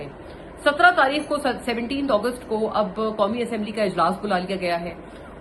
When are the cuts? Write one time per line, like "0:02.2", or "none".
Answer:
none